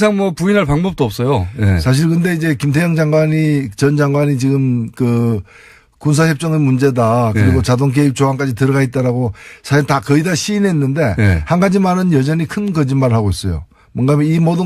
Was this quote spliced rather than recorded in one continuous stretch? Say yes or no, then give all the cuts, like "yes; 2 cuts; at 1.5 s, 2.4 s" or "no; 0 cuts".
yes; 1 cut; at 13.6 s